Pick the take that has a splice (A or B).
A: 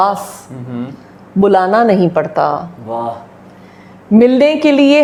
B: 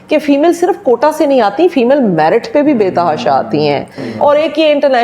B